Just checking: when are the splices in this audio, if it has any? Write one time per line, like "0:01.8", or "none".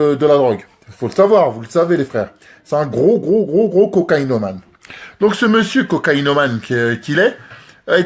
0:07.0

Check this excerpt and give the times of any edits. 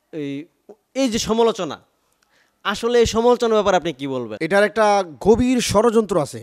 0:04.3

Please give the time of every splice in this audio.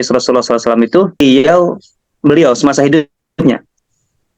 0:01.2

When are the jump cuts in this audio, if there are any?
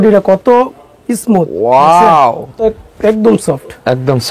0:02.6

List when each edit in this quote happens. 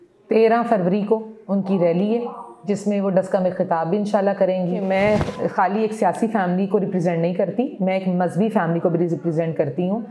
0:04.8

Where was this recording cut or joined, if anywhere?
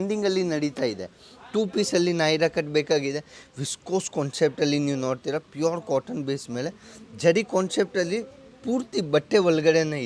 none

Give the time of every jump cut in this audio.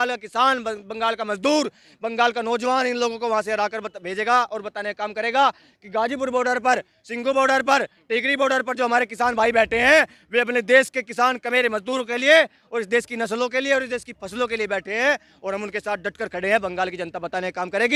none

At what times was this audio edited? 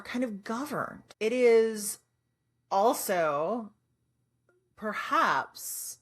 0:01.0

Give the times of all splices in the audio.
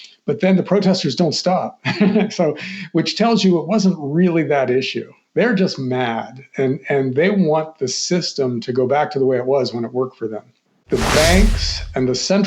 0:10.8

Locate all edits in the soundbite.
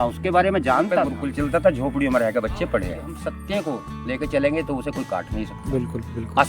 0:01.1
0:03.2

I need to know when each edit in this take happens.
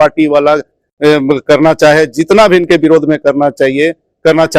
none

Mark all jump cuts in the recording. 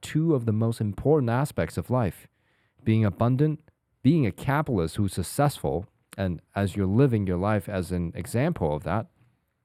none

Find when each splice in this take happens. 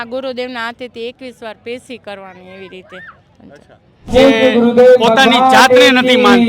0:04.1

